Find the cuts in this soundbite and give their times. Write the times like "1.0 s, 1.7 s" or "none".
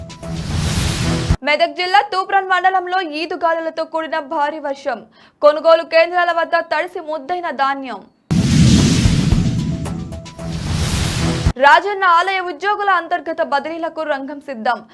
1.4 s